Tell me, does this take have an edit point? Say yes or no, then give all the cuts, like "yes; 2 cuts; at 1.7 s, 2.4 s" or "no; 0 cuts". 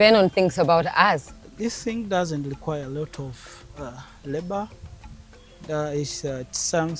yes; 1 cut; at 1.5 s